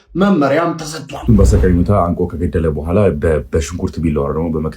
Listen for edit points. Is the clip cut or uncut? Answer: cut